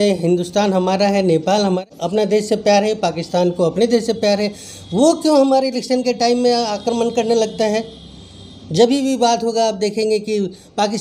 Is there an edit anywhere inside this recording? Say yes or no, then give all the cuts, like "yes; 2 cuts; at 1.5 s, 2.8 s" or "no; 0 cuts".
no; 0 cuts